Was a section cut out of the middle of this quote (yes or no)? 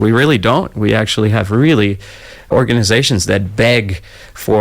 yes